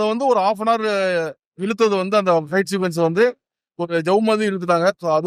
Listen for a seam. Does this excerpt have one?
no; 0 cuts

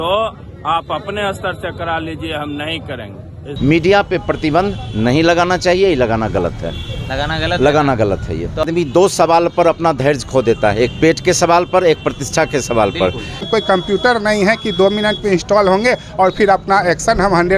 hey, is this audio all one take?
no; 3 cuts; at 3.4 s, 8.6 s, 13.4 s

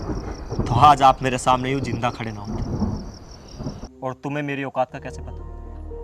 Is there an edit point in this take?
yes; 1 cut; at 3.9 s

